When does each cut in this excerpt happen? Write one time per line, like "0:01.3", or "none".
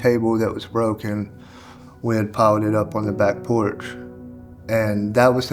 none